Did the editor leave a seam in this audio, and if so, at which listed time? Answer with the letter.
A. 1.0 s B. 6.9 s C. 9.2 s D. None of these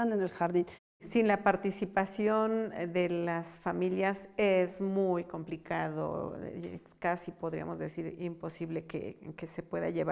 A